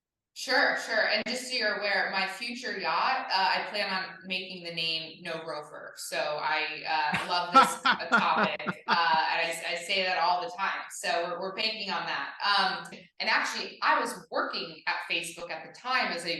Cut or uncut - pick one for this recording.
cut